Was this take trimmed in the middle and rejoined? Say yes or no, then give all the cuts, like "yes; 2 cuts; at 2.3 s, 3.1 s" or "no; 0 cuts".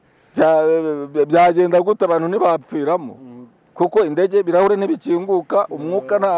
no; 0 cuts